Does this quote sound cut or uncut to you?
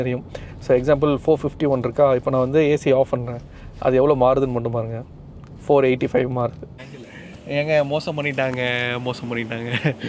cut